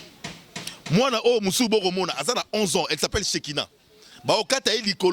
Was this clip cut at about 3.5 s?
no; 0 cuts

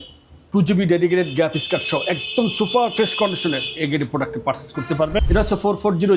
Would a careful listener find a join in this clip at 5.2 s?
yes; 1 cut; at 5.2 s

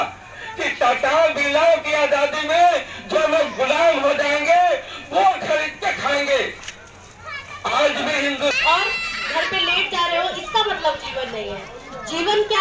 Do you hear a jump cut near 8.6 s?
yes; 1 cut; at 8.6 s

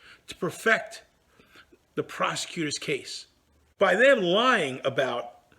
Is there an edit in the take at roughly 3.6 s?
yes; 1 cut; at 3.6 s

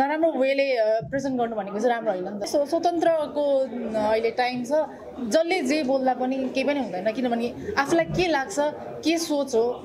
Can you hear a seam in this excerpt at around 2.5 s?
yes; 1 cut; at 2.5 s

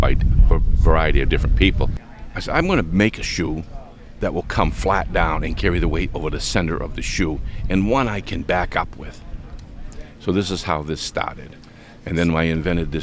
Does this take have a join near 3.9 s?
no; 1 cut; at 2.0 s

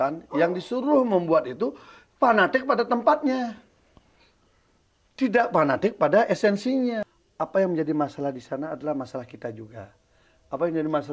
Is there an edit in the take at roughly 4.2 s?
no; 1 cut; at 7.1 s

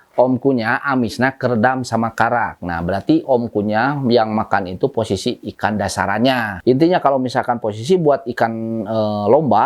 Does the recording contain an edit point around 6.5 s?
yes; 2 cuts; at 2.6 s, 6.5 s

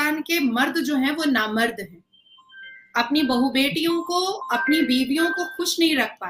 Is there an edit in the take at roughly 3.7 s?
no; 0 cuts

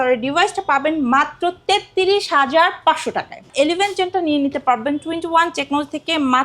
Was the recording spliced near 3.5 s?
yes; 1 cut; at 3.5 s

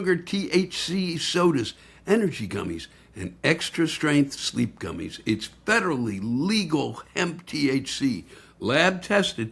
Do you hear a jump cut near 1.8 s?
no; 0 cuts

